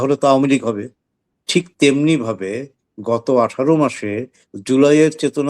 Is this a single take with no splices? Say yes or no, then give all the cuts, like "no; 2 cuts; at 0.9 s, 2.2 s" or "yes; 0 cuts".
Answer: yes; 0 cuts